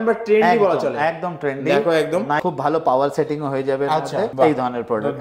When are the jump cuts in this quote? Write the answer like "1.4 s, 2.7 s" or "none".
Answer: 2.4 s